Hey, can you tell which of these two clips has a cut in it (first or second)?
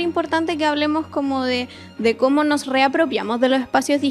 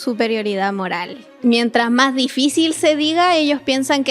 second